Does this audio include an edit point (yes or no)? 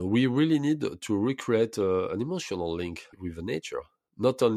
yes